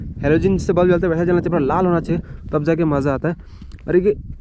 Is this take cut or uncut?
uncut